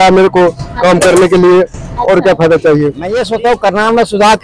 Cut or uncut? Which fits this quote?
cut